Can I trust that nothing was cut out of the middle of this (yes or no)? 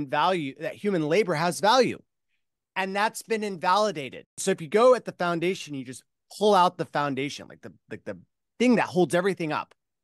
no